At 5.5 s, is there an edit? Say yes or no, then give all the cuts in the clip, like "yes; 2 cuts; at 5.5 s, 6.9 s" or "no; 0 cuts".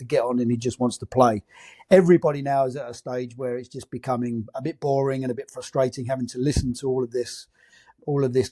no; 0 cuts